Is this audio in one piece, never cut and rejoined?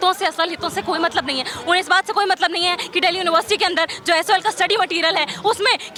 yes; 0 cuts

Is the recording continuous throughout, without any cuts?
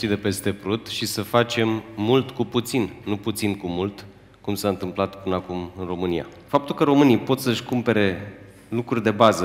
no; 1 cut; at 6.4 s

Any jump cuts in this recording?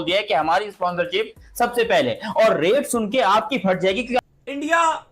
yes; 1 cut; at 4.2 s

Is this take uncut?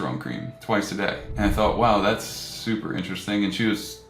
no; 1 cut; at 1.2 s

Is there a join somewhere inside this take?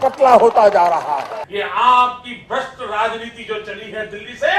yes; 1 cut; at 1.3 s

